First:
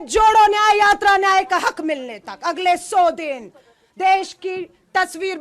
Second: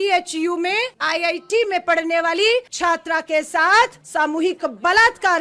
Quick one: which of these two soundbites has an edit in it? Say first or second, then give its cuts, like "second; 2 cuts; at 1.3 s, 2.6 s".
second; 3 cuts; at 1.0 s, 2.7 s, 4.0 s